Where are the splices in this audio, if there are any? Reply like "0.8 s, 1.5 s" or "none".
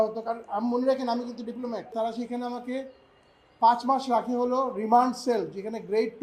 1.9 s